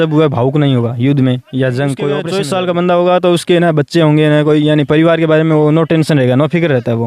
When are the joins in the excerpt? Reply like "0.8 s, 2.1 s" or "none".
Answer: 2.3 s